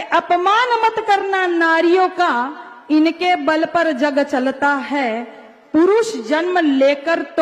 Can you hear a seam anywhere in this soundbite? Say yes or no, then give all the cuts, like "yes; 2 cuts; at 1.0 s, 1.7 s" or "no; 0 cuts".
no; 0 cuts